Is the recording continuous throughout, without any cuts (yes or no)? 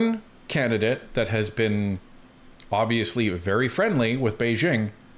yes